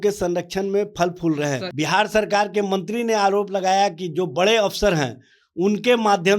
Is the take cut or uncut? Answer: cut